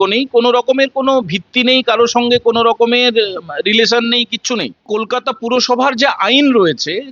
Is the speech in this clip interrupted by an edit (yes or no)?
yes